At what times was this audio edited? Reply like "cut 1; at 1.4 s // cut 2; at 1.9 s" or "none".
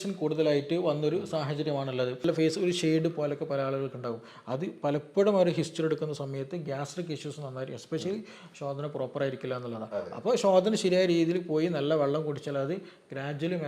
cut 1; at 2.3 s